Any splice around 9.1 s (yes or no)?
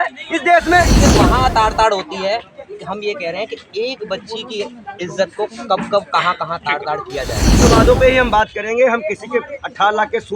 no